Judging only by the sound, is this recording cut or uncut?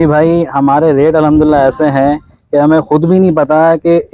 uncut